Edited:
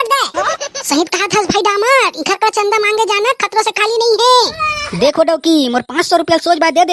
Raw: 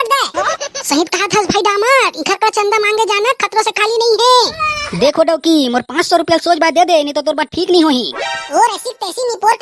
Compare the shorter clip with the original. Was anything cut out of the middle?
no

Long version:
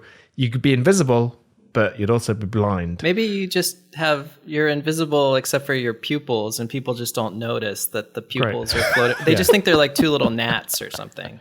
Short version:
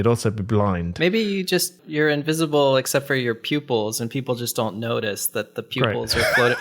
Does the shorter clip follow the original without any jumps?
no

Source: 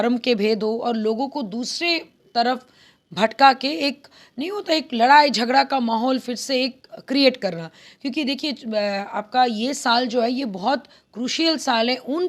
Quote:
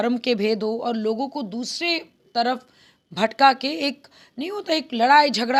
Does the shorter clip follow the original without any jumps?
yes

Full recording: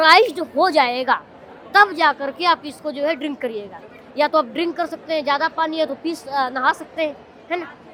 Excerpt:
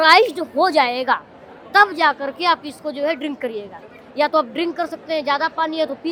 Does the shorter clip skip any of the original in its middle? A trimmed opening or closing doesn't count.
no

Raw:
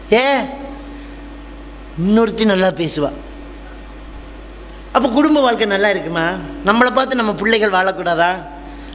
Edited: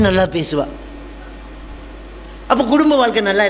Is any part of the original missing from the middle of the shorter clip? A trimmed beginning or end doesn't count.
no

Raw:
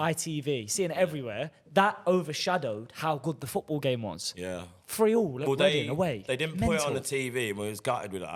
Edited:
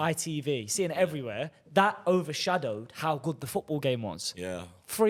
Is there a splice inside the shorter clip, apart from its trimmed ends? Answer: no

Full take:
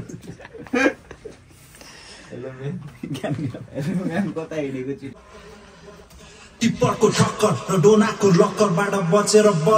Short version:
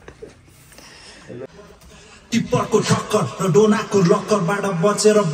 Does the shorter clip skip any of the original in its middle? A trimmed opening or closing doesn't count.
yes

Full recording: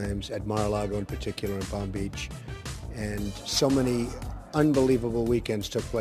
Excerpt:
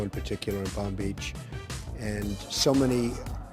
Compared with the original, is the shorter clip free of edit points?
yes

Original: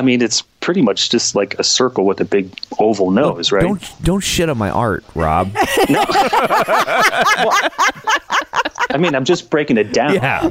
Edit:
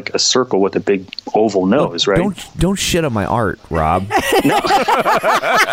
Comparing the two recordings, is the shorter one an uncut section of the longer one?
yes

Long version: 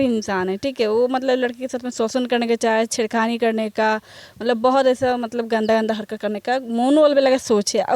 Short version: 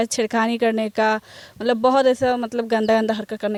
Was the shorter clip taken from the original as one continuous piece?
yes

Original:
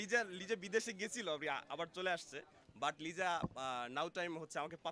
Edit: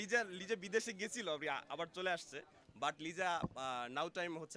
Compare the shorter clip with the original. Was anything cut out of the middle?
no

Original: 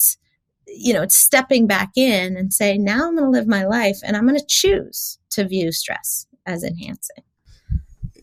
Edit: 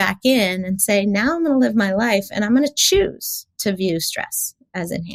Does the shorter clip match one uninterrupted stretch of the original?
yes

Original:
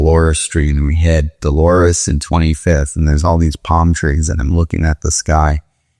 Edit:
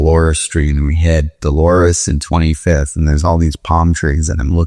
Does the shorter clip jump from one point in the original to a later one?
no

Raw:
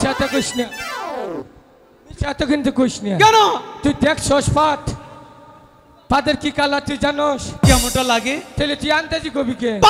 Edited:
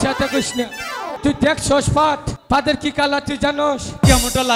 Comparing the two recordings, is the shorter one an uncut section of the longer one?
no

